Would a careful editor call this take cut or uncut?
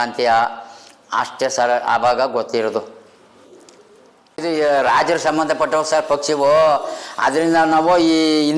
cut